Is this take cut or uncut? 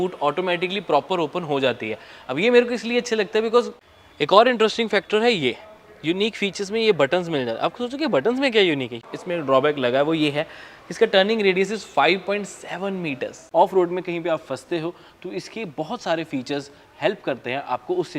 cut